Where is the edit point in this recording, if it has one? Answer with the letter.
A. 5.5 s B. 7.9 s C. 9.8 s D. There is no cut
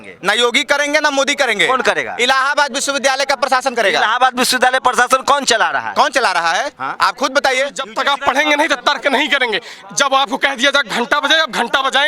B